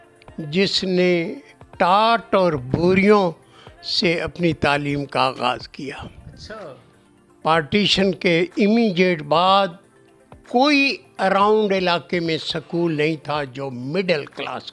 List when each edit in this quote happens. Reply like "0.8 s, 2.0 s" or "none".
none